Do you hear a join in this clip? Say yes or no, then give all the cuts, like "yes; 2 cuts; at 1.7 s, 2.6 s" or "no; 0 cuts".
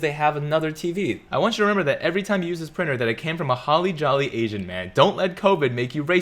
yes; 1 cut; at 1.2 s